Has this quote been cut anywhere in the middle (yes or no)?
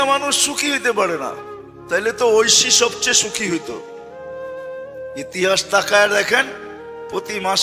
no